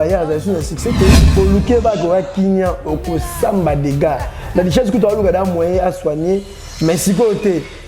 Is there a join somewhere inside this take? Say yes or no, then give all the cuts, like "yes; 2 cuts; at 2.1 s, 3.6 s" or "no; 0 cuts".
yes; 1 cut; at 1.4 s